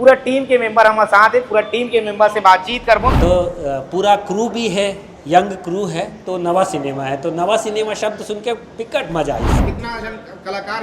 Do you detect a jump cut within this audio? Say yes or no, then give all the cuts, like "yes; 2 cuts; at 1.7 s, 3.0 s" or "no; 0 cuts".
yes; 2 cuts; at 3.2 s, 9.6 s